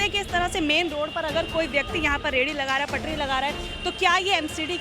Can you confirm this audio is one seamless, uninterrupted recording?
yes; 0 cuts

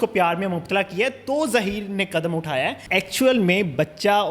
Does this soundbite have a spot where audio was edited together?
yes; 1 cut; at 2.8 s

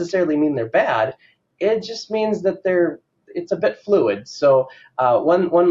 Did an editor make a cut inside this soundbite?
no; 0 cuts

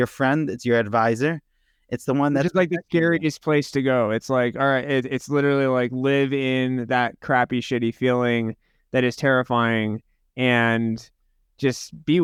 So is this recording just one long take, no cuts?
yes; 0 cuts

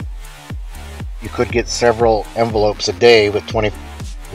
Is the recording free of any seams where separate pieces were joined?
no; 1 cut; at 1.1 s

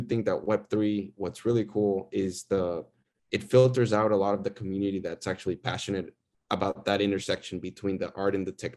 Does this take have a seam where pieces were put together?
no; 0 cuts

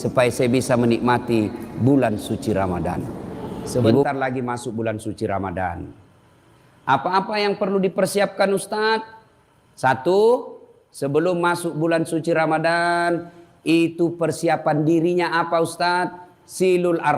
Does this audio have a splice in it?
yes; 1 cut; at 4.0 s

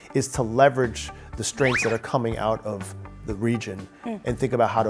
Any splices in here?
no; 0 cuts

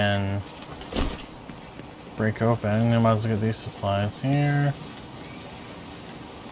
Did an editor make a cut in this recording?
yes; 1 cut; at 4.7 s

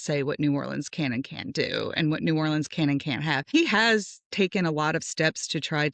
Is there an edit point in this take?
yes; 1 cut; at 3.5 s

